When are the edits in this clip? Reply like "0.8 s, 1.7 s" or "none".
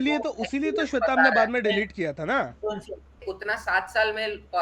3.2 s